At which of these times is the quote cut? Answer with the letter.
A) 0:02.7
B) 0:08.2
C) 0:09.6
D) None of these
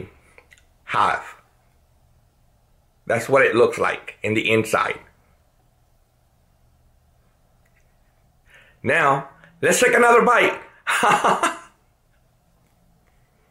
B